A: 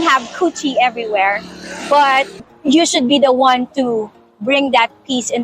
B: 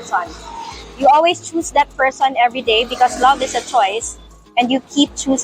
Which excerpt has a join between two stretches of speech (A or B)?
A